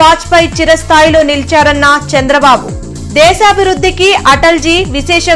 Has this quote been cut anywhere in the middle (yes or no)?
no